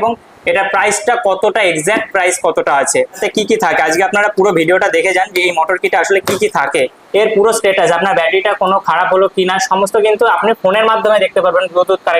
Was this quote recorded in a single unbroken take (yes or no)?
no